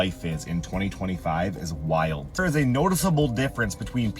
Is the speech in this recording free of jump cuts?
no; 1 cut; at 2.4 s

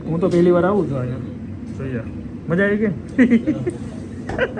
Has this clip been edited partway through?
no; 0 cuts

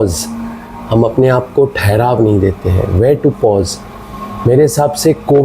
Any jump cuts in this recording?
no; 0 cuts

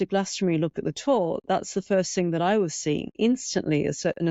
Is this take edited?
yes; 1 cut; at 3.1 s

